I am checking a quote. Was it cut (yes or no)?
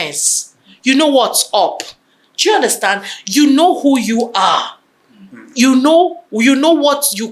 no